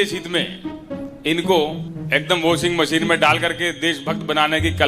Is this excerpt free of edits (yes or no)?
no